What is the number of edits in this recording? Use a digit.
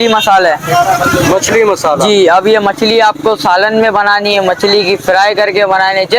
0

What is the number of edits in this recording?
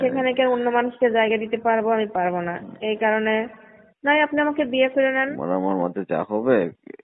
1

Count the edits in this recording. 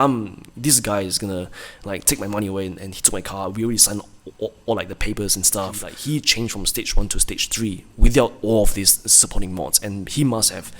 1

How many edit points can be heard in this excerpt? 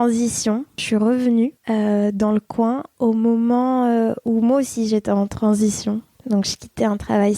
3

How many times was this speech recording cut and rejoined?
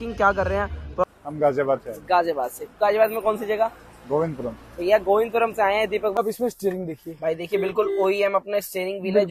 2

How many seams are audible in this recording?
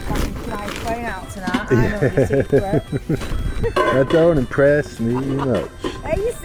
0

